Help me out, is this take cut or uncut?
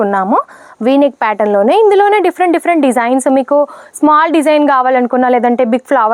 uncut